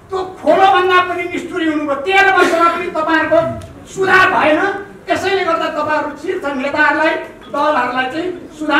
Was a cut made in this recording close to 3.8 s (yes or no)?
no